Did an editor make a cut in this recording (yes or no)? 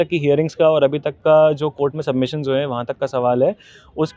no